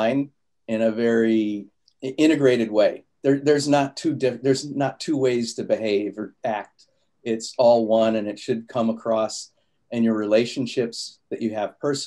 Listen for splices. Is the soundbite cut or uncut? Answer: uncut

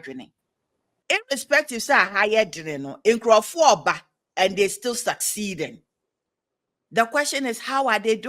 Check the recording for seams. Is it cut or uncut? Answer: cut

